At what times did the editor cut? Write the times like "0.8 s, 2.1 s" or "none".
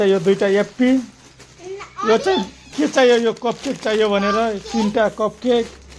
2.7 s